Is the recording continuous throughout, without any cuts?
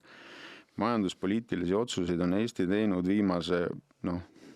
yes; 0 cuts

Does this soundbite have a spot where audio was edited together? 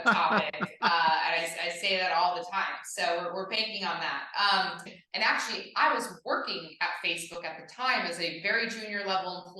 yes; 1 cut; at 4.8 s

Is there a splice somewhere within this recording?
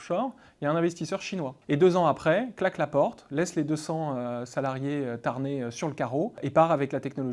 yes; 1 cut; at 1.6 s

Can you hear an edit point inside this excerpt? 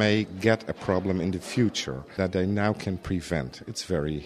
yes; 1 cut; at 2.1 s

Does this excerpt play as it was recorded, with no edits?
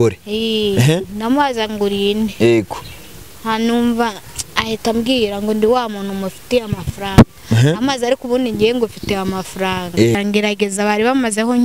no; 1 cut; at 10.2 s

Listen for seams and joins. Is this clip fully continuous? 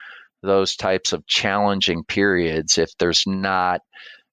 yes; 0 cuts

